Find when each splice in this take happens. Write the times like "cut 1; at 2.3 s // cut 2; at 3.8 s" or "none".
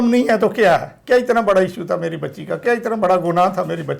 cut 1; at 0.9 s